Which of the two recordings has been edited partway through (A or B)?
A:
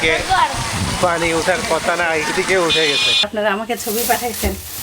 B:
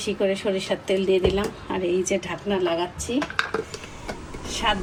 A